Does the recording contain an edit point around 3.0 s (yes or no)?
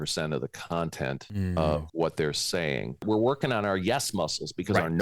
yes